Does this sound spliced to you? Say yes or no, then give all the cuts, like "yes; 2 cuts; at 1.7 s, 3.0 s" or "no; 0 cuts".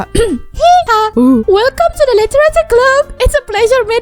yes; 1 cut; at 1.0 s